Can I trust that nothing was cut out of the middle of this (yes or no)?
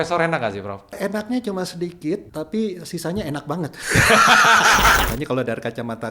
no